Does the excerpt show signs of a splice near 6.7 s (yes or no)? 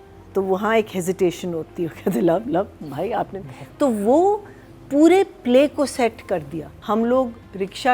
yes